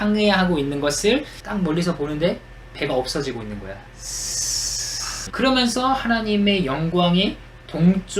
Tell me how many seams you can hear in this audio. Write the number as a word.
one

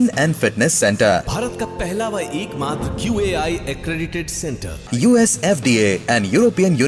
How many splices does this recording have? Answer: zero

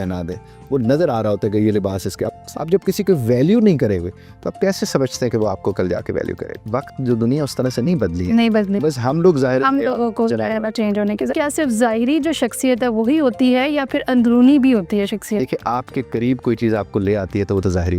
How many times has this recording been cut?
three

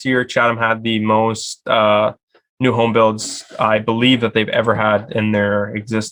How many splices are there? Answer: zero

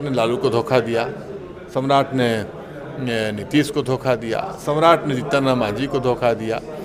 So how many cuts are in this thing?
zero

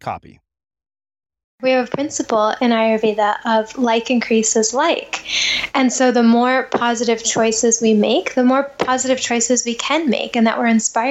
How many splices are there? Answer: one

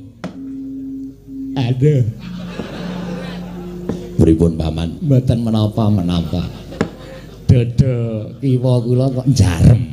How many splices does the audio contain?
one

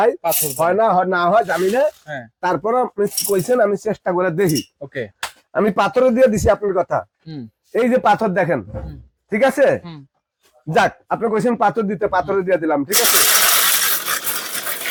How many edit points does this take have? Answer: zero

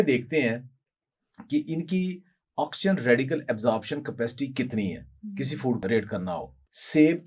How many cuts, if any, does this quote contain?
one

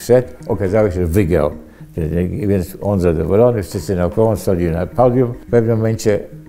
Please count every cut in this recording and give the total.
one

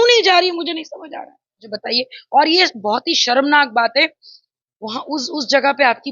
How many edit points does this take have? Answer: one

